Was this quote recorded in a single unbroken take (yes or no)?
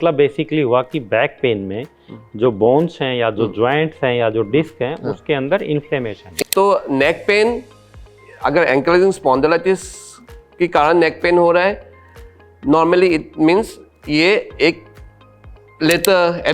no